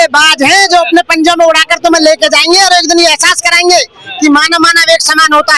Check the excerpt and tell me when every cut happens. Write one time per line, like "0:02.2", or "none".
none